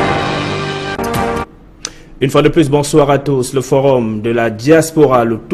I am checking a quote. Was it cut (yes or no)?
no